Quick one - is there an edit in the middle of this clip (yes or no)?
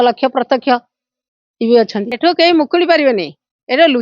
yes